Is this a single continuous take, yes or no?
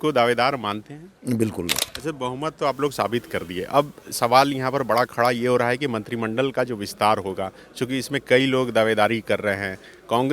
no